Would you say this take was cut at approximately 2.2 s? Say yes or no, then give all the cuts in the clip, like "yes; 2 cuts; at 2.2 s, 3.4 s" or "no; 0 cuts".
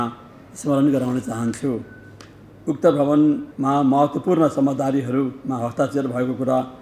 no; 1 cut; at 3.5 s